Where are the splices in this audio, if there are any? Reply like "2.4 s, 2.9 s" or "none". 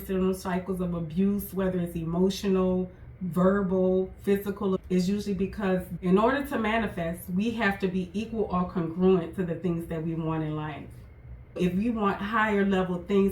4.8 s, 5.9 s, 11.6 s

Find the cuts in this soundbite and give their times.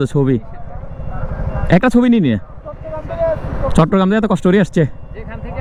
none

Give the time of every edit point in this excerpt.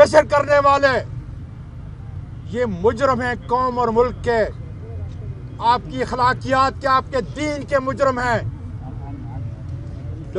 none

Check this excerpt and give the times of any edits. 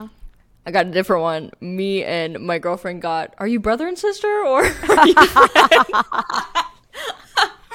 none

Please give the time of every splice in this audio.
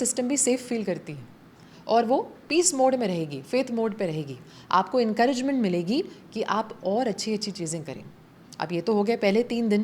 none

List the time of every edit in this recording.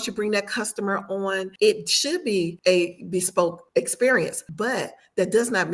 1.5 s, 2.5 s, 3.6 s, 4.4 s

